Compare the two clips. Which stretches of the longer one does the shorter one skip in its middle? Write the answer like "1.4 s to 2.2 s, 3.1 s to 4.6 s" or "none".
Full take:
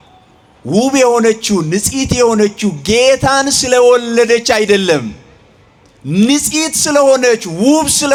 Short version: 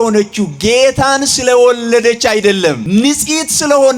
5.1 s to 6.1 s